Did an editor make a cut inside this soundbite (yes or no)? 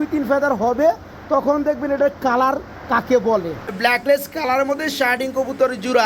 yes